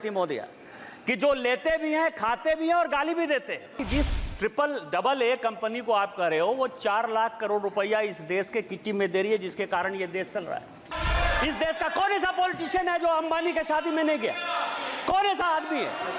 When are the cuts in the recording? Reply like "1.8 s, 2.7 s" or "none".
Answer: 3.8 s, 10.9 s

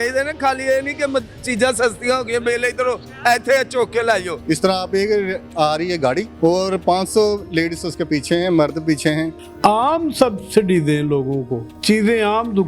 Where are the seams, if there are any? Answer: 4.4 s, 9.3 s

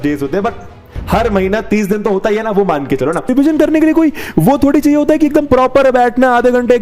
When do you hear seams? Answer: 3.3 s

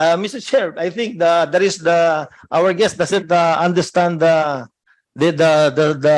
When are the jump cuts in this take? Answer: none

